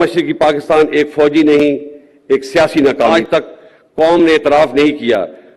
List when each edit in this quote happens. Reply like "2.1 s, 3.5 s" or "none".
3.2 s